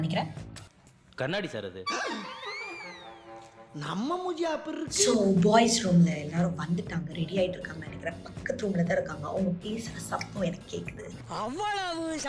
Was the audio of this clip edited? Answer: yes; 1 cut; at 5.1 s

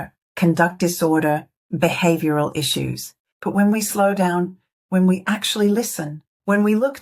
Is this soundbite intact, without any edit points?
yes; 0 cuts

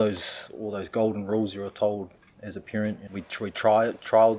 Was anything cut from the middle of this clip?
yes; 1 cut; at 3.1 s

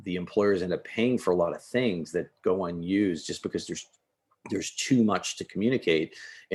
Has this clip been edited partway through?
no; 0 cuts

